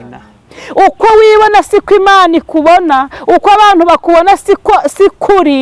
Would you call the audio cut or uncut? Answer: uncut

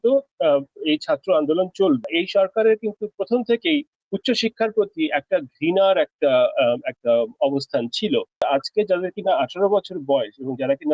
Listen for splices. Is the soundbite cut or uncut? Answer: cut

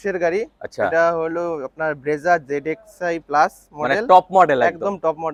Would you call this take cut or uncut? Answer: uncut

